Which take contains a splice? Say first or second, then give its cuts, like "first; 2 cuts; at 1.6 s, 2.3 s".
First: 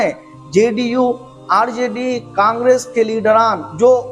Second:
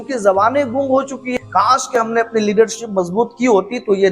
second; 1 cut; at 1.3 s